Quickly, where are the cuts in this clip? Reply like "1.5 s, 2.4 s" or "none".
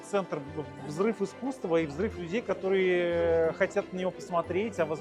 none